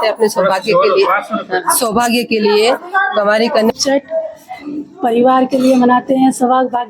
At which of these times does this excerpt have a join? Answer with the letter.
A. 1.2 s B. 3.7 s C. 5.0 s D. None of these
B